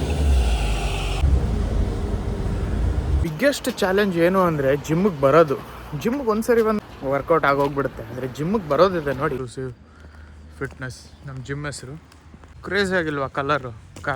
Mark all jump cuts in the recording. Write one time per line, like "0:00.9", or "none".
0:03.2
0:06.8
0:09.5